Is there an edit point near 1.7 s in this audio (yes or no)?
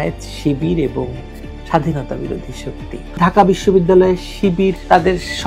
no